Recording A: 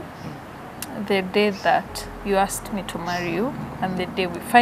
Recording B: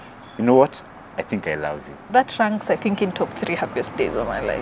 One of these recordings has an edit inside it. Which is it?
B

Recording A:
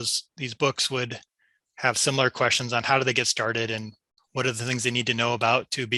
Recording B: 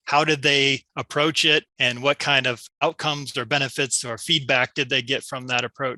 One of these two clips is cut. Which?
B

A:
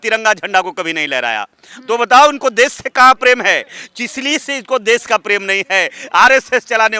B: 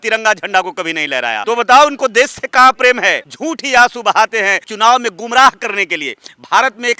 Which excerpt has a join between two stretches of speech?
B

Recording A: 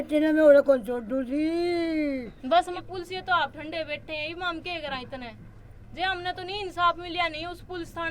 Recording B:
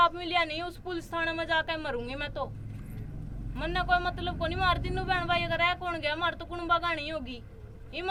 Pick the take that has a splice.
A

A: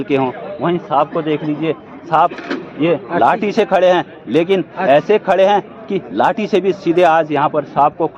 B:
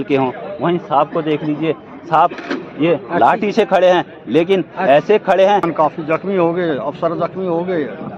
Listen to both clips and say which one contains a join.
B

